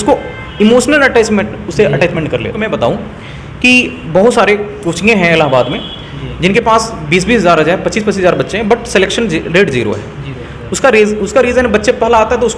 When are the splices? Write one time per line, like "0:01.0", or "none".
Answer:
0:02.6